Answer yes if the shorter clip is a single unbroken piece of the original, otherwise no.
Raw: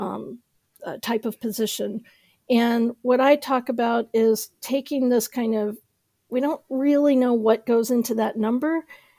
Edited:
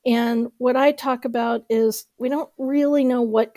no